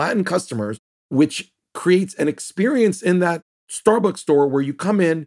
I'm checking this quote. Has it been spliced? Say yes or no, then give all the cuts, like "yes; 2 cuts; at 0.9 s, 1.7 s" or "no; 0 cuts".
no; 0 cuts